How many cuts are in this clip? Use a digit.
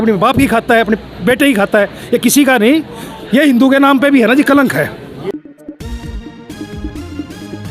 1